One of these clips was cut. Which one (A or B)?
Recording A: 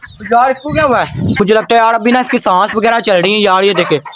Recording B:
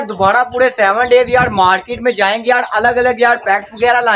A